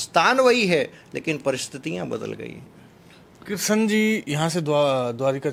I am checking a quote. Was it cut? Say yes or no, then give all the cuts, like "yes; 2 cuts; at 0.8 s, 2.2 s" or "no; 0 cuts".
no; 0 cuts